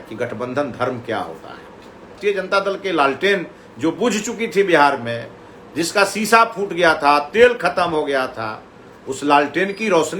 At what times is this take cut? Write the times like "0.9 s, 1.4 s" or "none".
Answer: 2.2 s